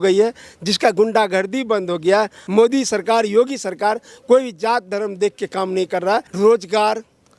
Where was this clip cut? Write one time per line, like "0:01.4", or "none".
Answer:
0:02.4
0:06.3